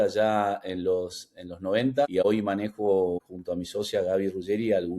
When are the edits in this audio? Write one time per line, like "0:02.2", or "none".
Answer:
0:02.2